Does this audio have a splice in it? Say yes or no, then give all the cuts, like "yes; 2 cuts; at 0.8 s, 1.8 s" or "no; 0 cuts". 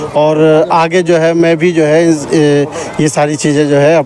no; 0 cuts